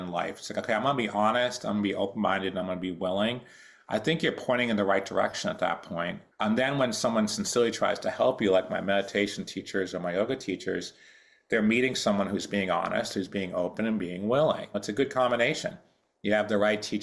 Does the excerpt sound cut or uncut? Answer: cut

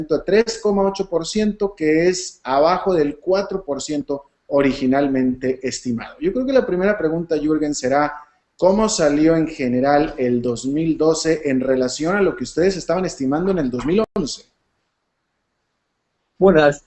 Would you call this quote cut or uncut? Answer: cut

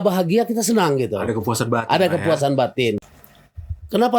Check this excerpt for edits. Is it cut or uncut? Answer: cut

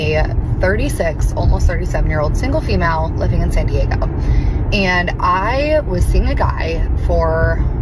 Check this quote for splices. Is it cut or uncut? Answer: uncut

